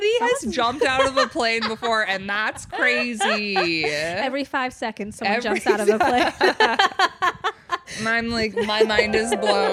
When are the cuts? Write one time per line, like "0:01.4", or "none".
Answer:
none